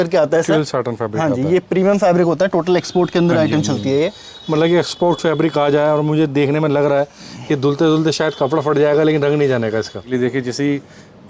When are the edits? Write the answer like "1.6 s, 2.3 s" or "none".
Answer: 10.0 s